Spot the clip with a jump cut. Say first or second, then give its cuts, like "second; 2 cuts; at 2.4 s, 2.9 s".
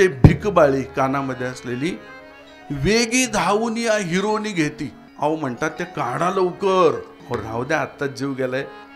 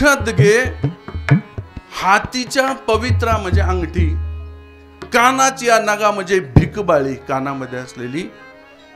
first; 2 cuts; at 5.0 s, 7.1 s